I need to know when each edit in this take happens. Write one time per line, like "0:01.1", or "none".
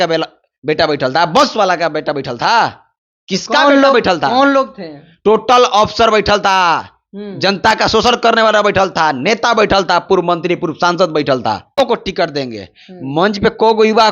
0:11.8